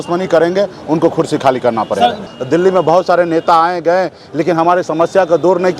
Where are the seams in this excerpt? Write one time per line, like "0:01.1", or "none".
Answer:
0:02.3